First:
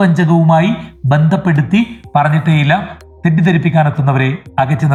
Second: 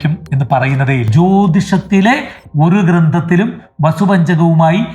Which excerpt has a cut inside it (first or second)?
second